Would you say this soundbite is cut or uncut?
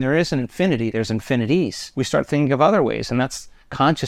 cut